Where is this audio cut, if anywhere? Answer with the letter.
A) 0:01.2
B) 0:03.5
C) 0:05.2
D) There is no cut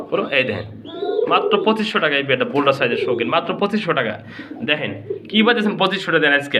D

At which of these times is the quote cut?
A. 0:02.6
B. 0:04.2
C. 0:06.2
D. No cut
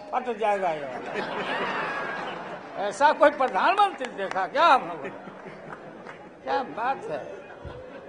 C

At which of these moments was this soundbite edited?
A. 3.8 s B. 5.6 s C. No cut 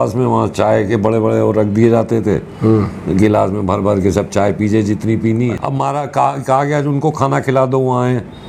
B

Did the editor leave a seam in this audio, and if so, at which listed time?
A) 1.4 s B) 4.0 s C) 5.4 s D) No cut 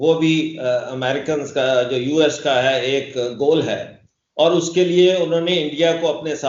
D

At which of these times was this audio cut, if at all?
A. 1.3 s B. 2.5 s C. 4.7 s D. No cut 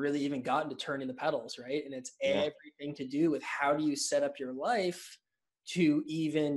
D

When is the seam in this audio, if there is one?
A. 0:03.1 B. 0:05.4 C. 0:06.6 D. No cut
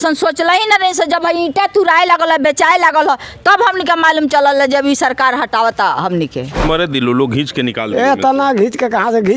C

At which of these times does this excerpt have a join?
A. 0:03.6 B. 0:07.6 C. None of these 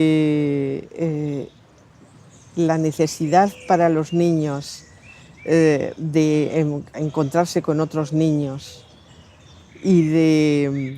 B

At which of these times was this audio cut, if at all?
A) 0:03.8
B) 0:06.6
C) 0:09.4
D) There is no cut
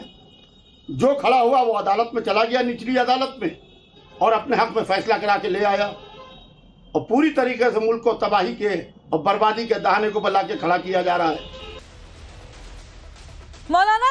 C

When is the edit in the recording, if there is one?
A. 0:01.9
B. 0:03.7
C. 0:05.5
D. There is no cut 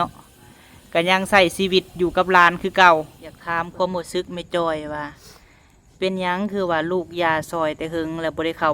B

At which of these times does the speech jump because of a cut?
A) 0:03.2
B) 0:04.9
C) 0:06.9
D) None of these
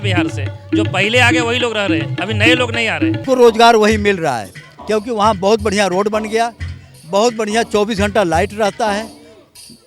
A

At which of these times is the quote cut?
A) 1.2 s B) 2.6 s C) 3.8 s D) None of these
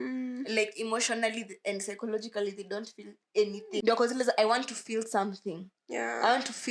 C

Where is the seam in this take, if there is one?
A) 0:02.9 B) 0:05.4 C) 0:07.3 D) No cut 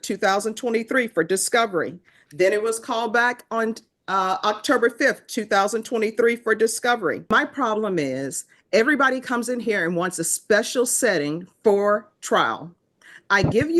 C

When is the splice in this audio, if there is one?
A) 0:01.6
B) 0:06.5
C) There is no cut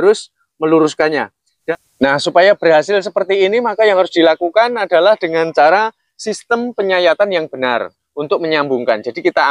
A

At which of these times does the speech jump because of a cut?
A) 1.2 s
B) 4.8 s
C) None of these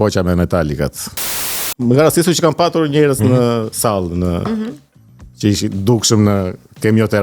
A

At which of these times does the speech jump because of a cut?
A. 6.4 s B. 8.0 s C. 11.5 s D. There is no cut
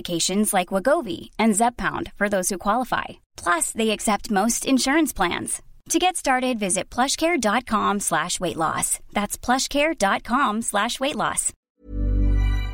C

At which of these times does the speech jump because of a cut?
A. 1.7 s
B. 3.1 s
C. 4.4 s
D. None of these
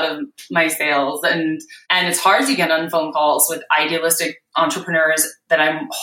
A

